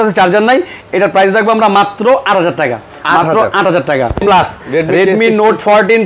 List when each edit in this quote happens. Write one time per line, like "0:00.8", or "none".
0:04.2